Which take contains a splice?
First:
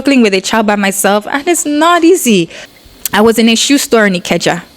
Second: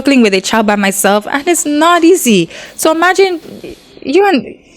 first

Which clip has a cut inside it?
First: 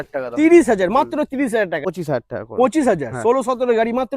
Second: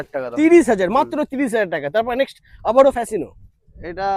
first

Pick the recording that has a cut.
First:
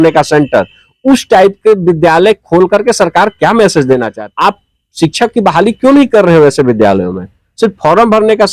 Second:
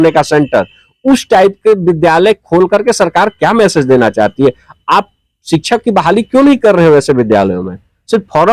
first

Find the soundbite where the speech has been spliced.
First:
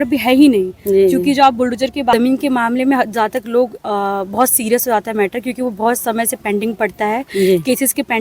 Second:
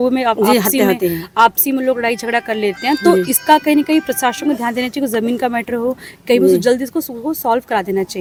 first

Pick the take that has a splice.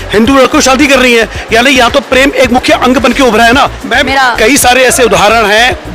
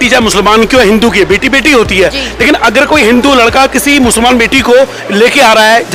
first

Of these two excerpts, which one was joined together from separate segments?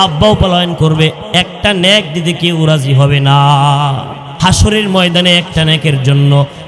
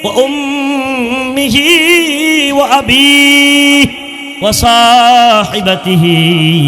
first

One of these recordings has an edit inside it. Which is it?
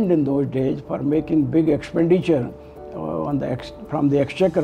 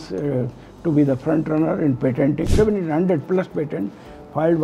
second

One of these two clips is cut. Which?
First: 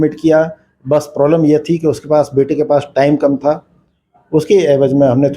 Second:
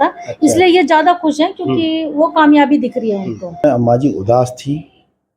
second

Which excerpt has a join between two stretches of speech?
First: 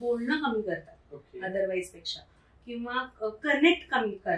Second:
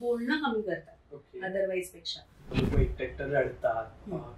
second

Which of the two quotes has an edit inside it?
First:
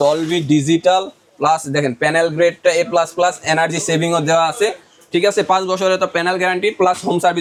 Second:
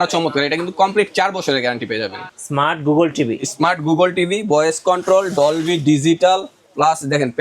second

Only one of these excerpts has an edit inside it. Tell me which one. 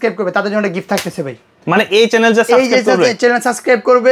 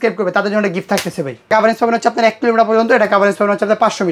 second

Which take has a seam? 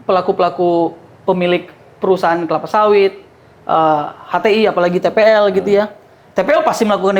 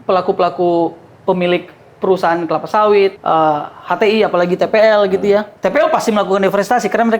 second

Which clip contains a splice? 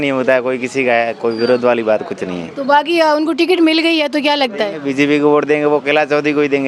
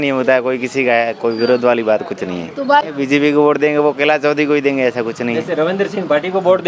second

